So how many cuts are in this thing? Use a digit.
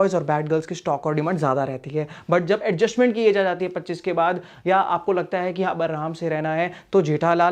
0